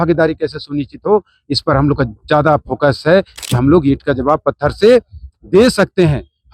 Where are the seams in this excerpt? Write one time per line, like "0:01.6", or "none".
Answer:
0:03.4